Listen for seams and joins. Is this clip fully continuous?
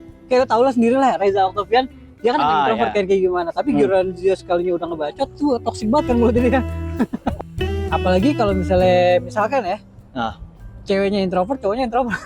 no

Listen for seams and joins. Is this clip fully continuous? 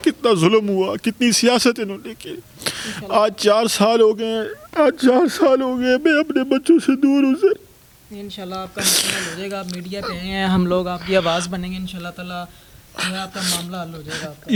yes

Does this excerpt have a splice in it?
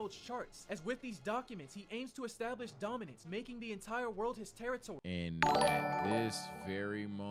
yes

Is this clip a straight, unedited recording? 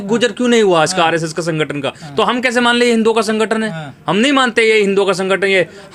yes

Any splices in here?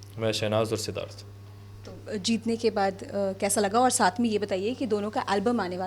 no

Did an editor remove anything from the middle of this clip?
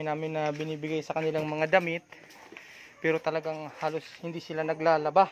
no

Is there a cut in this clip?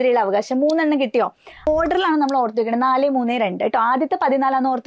yes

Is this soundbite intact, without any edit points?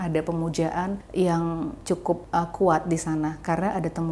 no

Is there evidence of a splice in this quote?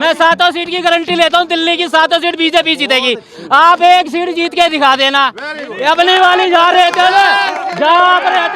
no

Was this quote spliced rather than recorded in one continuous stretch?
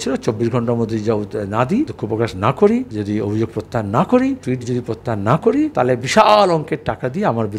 yes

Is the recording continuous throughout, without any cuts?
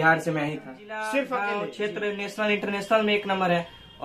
no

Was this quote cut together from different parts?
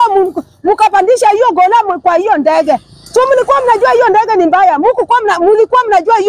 no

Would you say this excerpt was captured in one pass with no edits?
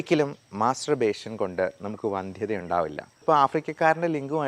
no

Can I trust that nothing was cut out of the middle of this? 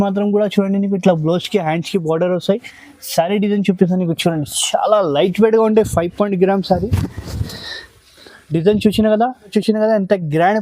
no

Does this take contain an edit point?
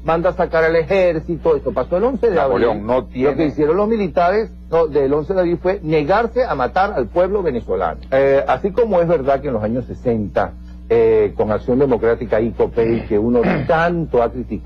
yes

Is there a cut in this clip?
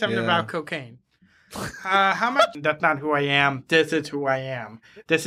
yes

